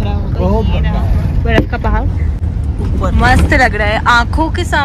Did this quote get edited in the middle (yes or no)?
no